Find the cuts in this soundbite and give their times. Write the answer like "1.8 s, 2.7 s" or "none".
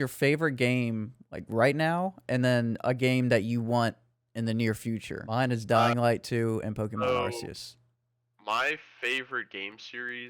5.2 s

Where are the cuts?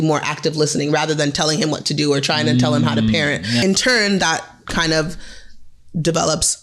3.6 s

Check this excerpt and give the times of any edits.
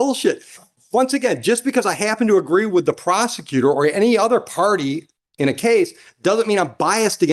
none

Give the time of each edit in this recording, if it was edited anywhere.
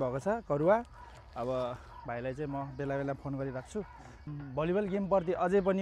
4.2 s

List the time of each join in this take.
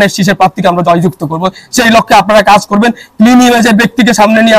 none

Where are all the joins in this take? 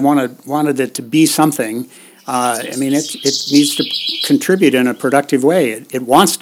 none

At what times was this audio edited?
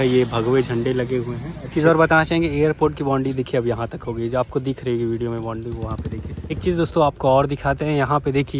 1.6 s, 6.3 s

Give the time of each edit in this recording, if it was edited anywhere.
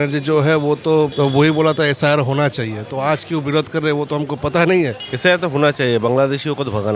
1.1 s, 5.0 s

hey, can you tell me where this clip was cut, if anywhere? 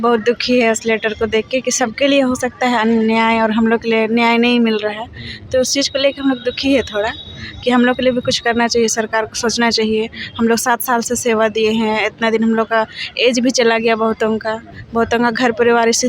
none

